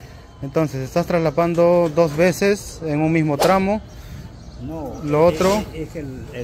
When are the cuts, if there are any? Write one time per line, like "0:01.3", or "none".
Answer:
none